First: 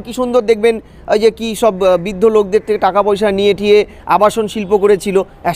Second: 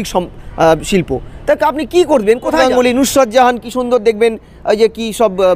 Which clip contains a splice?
second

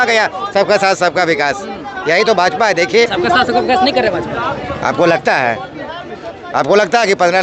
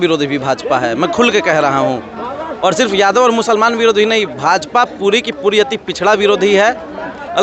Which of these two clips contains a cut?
first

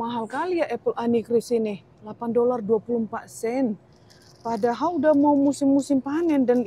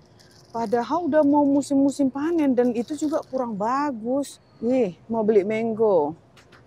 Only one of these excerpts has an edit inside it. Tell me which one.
second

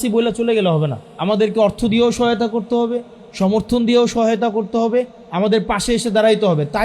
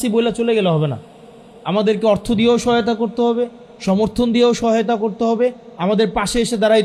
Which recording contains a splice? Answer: first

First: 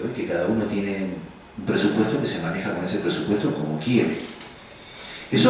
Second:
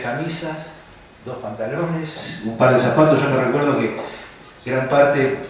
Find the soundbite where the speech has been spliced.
second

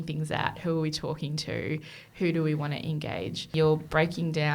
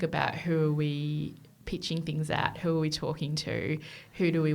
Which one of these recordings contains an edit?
first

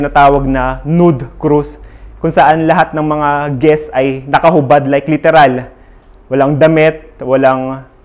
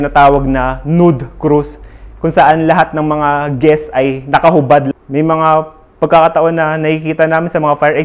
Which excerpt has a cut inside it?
second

